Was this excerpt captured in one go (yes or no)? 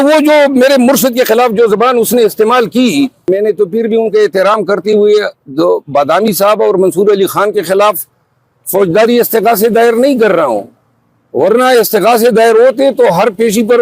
no